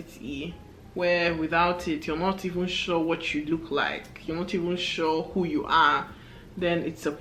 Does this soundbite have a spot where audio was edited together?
no; 0 cuts

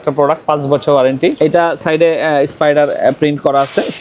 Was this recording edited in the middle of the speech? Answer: yes; 1 cut; at 1.3 s

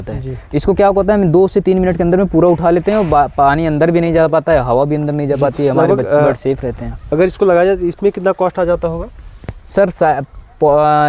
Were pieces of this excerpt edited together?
no; 0 cuts

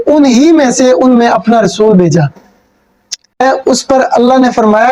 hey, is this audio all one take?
no; 1 cut; at 3.4 s

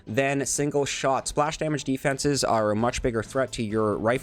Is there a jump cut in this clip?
no; 0 cuts

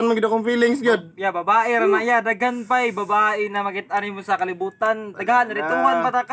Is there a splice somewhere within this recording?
yes; 1 cut; at 1.4 s

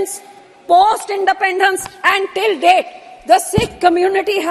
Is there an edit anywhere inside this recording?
no; 0 cuts

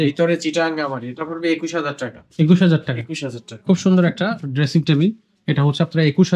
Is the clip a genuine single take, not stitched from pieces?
yes; 0 cuts

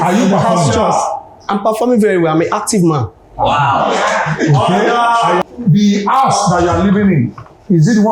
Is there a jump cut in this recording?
yes; 1 cut; at 5.4 s

